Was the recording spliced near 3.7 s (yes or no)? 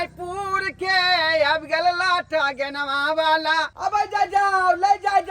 yes